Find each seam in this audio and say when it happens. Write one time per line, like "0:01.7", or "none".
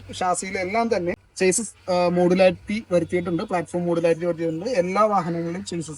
0:01.2